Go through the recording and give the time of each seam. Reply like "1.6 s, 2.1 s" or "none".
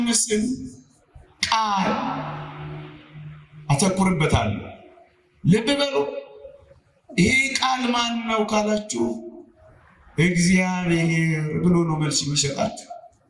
none